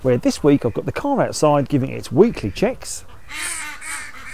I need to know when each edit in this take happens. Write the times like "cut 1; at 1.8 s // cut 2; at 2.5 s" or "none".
none